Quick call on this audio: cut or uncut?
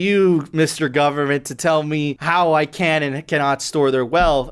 uncut